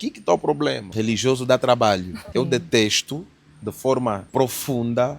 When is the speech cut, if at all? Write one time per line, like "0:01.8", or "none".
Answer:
0:00.9
0:02.3
0:04.2